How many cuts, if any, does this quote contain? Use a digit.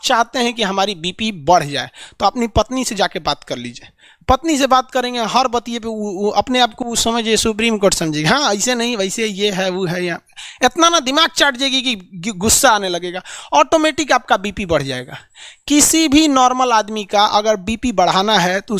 0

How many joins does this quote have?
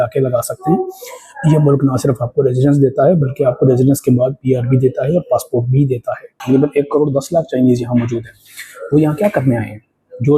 1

